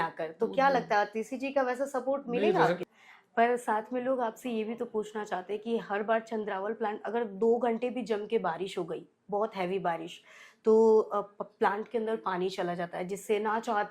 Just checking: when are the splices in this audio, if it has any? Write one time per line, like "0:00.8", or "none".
0:02.8